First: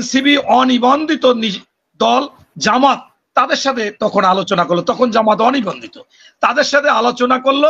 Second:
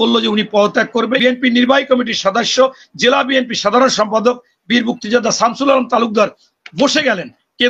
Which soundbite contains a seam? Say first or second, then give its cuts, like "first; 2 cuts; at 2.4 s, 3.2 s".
second; 1 cut; at 1.2 s